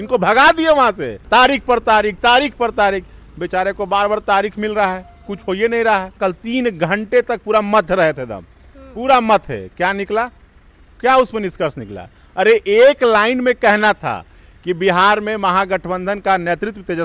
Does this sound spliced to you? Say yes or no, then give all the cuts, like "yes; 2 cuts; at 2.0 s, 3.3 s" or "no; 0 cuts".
yes; 2 cuts; at 1.2 s, 6.1 s